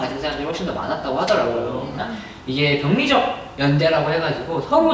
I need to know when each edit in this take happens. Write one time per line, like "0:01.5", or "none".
0:02.0